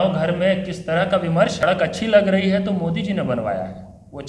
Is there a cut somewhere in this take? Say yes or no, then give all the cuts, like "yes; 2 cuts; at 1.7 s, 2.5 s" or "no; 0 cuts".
yes; 1 cut; at 1.6 s